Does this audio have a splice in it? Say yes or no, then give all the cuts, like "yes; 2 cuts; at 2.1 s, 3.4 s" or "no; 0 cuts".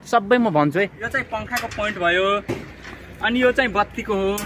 yes; 1 cut; at 1.0 s